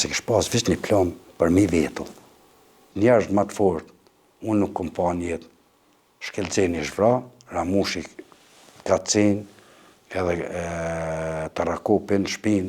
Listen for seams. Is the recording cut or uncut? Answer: cut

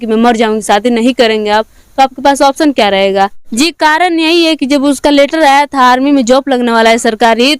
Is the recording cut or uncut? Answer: cut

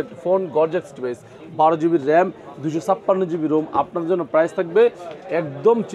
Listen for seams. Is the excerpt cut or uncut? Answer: uncut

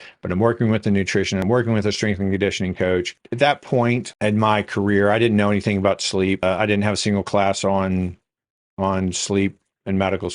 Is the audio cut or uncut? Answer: cut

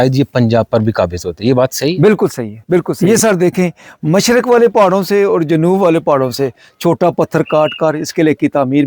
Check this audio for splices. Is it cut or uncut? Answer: cut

